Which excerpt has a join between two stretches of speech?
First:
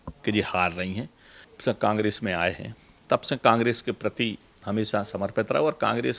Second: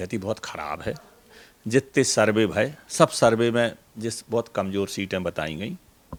first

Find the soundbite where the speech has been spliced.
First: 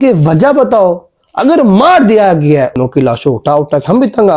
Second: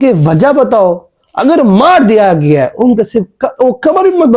first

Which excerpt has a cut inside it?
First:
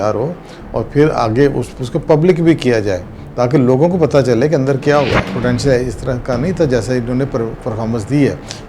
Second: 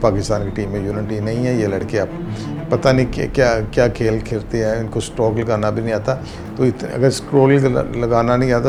first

